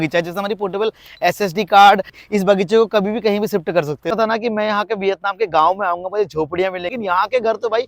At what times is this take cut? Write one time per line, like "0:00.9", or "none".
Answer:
0:02.1
0:04.2
0:06.9